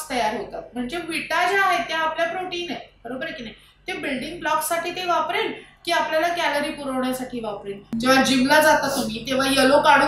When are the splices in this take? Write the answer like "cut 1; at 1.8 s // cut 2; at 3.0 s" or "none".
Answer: cut 1; at 7.9 s